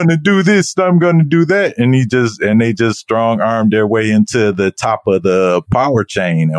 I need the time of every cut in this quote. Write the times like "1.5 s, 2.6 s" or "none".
5.7 s